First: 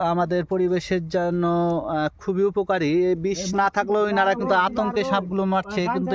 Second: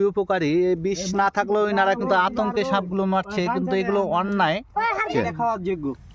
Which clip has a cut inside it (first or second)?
second